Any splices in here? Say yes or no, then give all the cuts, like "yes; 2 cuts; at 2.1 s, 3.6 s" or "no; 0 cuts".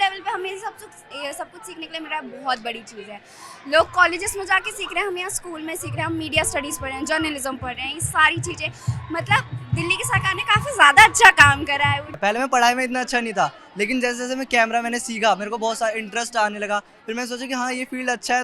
yes; 1 cut; at 12.1 s